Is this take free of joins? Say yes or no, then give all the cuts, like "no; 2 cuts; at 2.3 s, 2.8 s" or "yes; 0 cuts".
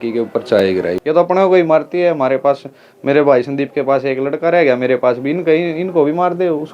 no; 1 cut; at 0.9 s